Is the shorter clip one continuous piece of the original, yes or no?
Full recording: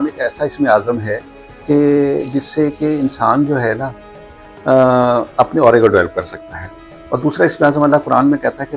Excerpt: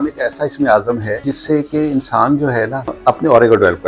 no